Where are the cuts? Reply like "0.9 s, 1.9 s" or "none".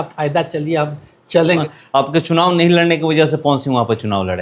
1.6 s

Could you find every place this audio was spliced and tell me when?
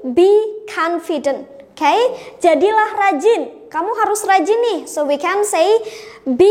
none

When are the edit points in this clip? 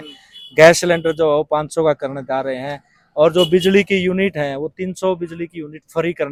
none

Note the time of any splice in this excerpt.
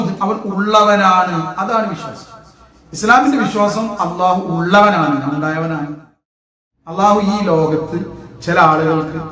6.4 s

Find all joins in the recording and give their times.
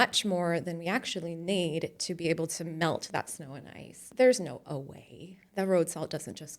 4.0 s

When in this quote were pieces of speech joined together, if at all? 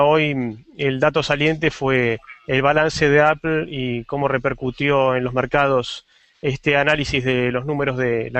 none

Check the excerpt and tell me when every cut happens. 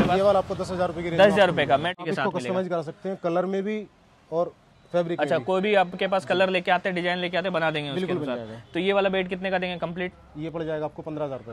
2.0 s

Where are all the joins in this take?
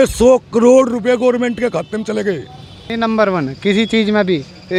2.8 s

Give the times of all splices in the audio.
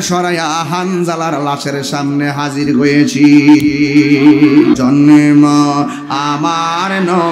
4.8 s

